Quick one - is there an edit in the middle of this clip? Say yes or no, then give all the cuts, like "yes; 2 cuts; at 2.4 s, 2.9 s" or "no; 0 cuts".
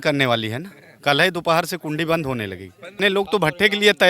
yes; 1 cut; at 2.9 s